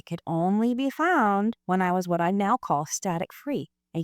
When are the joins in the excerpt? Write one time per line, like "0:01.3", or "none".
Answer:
0:01.6